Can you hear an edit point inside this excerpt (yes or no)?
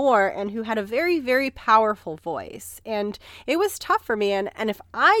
no